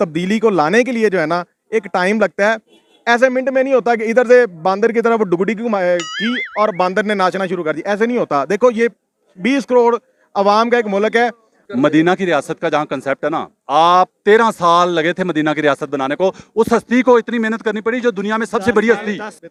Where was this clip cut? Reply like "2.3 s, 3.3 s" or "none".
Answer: none